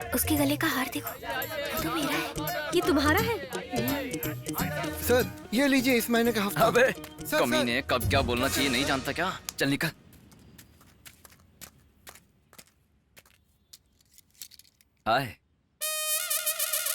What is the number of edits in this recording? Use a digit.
1